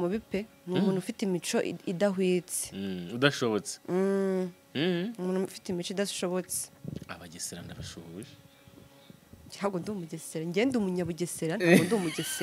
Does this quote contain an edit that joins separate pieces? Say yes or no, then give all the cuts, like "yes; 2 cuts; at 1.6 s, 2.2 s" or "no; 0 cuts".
no; 0 cuts